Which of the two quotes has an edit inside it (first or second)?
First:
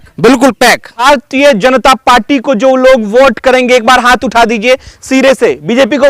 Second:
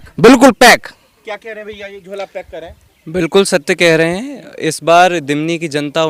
first